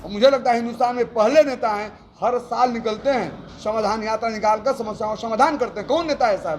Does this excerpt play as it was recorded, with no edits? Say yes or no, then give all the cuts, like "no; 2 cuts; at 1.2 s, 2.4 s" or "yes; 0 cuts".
yes; 0 cuts